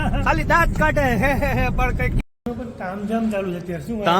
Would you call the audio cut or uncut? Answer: cut